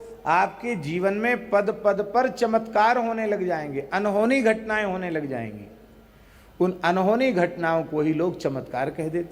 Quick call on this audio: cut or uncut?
uncut